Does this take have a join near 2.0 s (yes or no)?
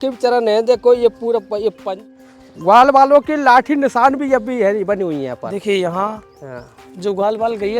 yes